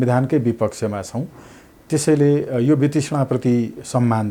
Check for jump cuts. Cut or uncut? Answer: uncut